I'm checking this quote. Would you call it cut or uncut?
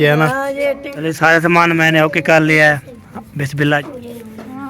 cut